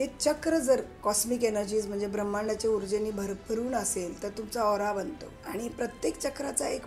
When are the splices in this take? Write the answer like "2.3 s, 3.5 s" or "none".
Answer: 0.9 s, 5.4 s